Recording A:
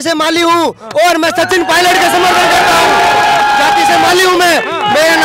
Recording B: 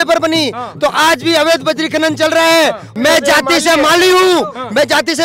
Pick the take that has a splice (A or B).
B